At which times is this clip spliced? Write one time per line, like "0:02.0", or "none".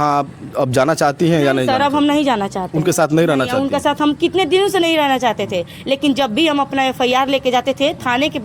none